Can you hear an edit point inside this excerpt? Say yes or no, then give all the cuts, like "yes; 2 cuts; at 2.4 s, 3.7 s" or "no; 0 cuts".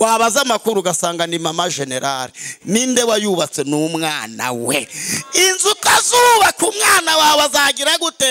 no; 0 cuts